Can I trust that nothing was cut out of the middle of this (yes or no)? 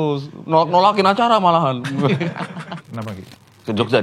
no